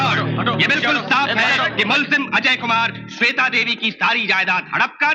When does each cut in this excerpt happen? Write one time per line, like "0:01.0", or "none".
none